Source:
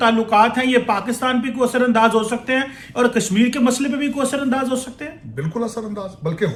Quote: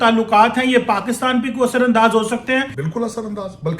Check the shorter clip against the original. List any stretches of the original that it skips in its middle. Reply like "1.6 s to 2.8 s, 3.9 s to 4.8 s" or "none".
2.8 s to 5.4 s